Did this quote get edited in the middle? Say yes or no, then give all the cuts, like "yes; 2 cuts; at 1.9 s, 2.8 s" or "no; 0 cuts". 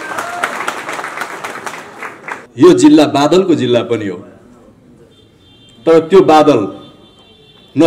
yes; 1 cut; at 2.5 s